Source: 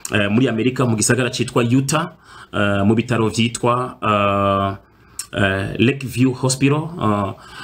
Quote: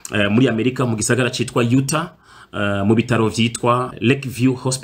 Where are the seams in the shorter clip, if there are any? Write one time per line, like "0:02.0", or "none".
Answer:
0:03.9